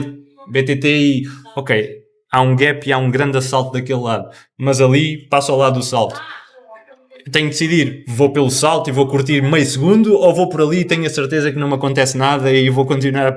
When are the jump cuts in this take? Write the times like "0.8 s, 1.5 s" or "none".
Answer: none